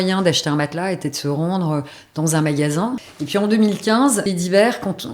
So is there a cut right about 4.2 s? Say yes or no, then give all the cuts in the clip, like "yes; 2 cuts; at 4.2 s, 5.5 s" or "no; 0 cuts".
yes; 2 cuts; at 3.1 s, 4.2 s